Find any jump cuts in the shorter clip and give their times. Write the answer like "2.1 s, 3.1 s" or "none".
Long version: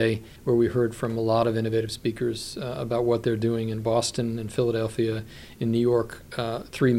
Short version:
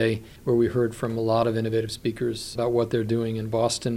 2.5 s